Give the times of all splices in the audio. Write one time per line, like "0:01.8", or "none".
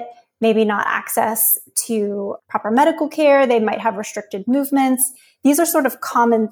0:02.4